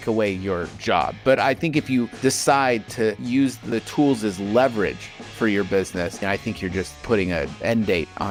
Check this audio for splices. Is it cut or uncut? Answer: uncut